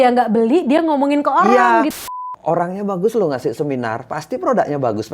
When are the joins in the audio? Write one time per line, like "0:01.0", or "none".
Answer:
0:01.9